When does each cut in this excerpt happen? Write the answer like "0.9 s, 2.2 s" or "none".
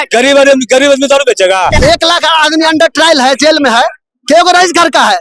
1.7 s